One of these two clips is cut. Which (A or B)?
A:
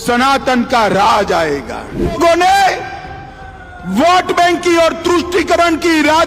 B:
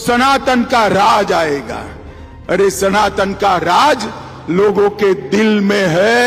A